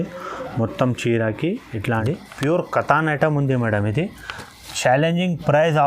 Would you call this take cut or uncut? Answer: cut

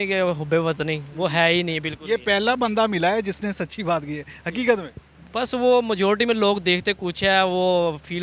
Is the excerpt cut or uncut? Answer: uncut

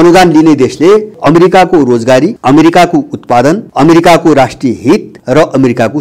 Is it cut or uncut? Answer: cut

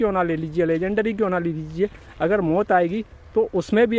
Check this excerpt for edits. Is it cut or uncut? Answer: uncut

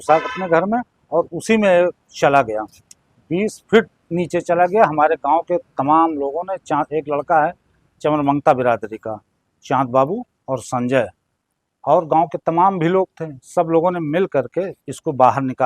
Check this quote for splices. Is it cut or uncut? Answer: uncut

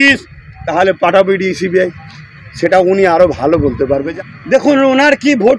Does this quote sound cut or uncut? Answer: cut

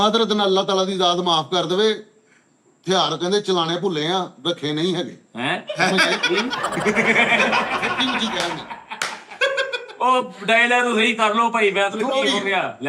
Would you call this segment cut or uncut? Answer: uncut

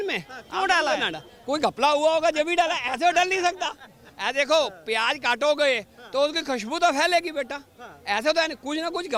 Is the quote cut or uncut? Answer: uncut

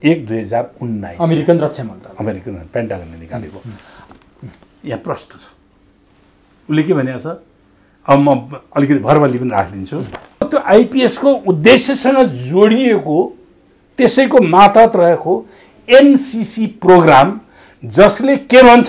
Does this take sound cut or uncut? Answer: cut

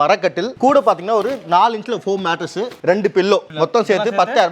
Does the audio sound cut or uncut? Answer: cut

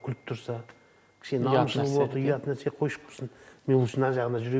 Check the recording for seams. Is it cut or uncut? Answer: uncut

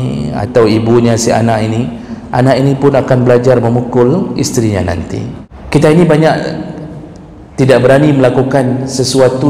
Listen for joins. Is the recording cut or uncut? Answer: cut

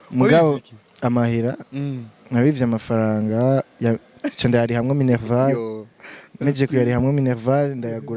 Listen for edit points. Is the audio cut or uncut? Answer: uncut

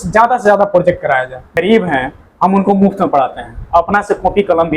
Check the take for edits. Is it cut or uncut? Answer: cut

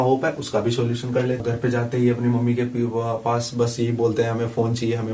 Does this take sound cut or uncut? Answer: cut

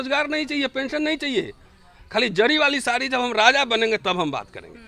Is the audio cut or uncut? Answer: uncut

